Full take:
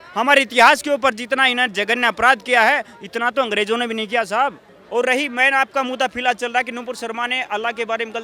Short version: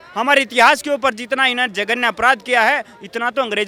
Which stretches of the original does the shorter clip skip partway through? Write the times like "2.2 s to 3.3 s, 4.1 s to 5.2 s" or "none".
none